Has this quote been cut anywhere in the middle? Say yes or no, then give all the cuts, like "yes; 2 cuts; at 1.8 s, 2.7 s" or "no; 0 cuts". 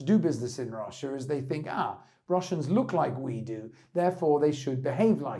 no; 0 cuts